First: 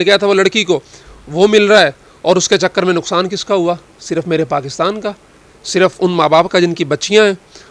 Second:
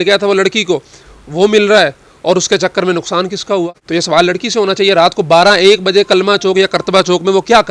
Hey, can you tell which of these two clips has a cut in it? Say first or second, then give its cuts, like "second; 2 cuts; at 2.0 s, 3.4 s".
second; 1 cut; at 3.8 s